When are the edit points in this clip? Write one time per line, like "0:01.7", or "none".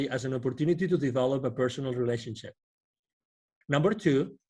0:03.5